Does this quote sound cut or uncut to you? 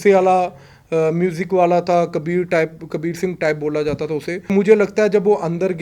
cut